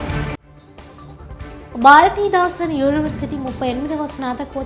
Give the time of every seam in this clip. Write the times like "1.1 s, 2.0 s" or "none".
1.1 s